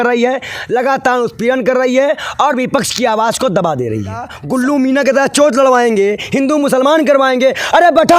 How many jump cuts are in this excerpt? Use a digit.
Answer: 1